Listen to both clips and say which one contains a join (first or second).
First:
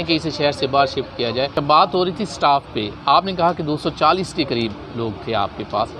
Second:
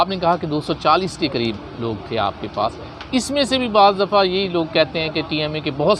first